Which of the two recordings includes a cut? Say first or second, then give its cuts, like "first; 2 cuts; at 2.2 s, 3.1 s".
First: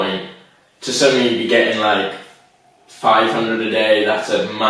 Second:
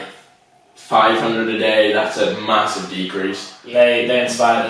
second; 1 cut; at 3.5 s